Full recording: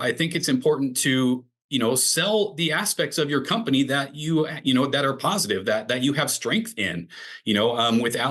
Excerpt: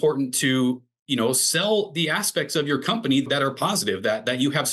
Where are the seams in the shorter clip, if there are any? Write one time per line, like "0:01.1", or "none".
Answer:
0:03.3